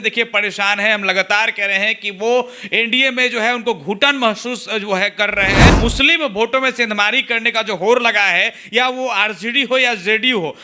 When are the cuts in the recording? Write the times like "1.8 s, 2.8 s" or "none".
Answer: 5.7 s